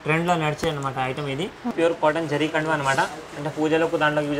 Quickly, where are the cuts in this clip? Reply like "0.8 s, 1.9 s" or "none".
1.7 s